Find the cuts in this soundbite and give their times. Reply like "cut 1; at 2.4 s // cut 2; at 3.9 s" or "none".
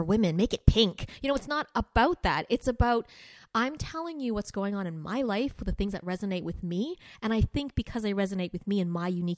none